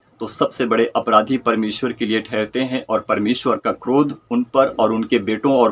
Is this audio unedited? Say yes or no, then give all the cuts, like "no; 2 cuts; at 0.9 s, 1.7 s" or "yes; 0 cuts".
yes; 0 cuts